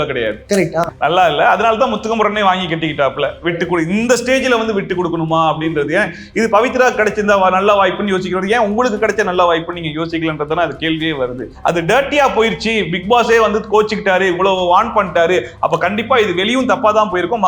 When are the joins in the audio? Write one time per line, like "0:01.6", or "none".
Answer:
0:00.8
0:11.5